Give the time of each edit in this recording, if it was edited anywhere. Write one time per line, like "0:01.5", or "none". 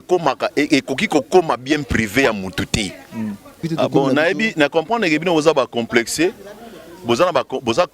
0:03.7